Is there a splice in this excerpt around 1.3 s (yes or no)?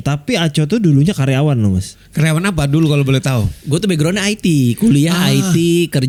no